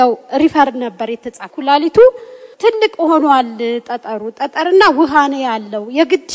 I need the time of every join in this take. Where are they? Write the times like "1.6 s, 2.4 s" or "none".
1.5 s, 2.4 s